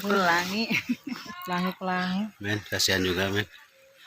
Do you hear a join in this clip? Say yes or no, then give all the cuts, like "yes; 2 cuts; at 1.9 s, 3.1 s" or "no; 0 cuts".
no; 0 cuts